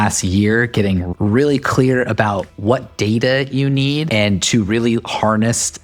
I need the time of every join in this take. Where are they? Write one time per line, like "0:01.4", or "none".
0:02.5
0:04.0